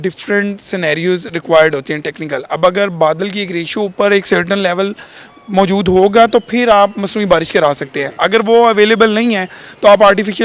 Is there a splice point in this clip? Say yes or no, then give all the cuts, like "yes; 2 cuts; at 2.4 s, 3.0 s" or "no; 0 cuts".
no; 0 cuts